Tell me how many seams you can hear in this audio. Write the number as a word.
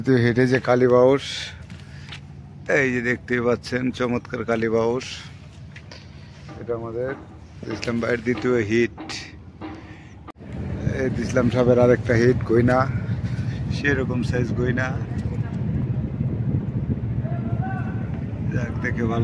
one